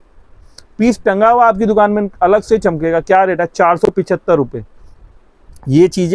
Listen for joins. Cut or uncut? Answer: uncut